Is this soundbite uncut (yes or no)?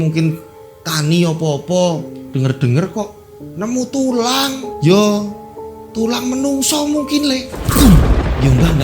no